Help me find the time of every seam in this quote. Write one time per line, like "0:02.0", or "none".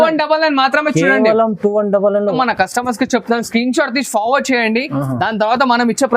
0:02.3